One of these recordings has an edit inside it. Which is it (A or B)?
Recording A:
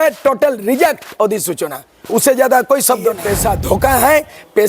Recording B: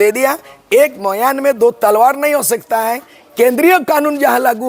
A